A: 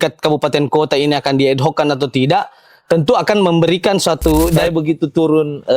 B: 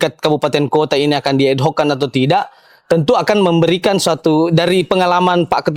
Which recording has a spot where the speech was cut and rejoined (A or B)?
A